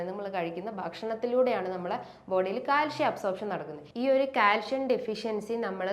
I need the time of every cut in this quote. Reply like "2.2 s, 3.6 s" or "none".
3.8 s